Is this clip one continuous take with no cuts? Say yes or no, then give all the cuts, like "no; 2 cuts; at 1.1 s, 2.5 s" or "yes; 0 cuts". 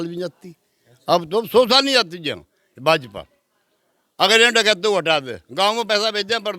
yes; 0 cuts